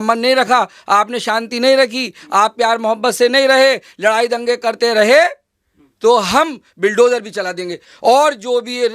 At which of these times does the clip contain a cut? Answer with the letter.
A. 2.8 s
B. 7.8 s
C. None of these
B